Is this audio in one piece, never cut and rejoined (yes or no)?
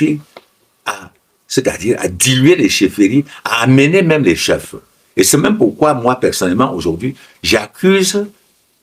yes